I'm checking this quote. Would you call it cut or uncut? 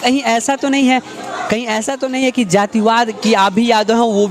uncut